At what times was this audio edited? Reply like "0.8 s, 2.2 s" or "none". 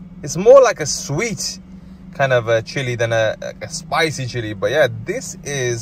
none